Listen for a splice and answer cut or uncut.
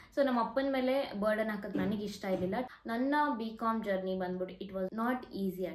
uncut